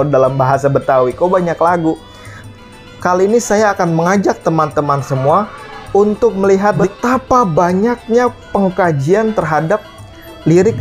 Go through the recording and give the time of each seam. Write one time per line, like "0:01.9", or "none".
0:02.4
0:06.8